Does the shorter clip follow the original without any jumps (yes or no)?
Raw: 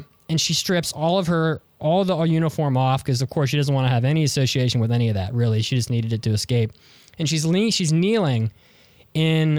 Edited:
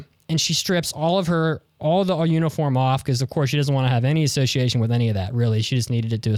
yes